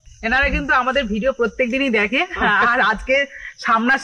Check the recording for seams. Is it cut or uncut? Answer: uncut